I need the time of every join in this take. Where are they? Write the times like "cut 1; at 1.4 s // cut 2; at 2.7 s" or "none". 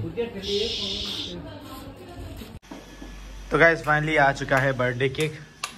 cut 1; at 2.6 s